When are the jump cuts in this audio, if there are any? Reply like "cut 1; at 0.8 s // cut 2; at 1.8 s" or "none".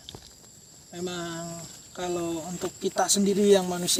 none